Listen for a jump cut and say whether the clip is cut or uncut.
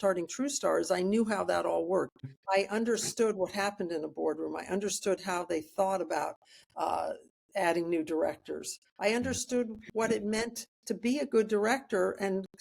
cut